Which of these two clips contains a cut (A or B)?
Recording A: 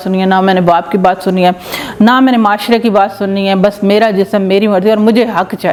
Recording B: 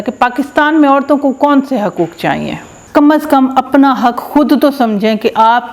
B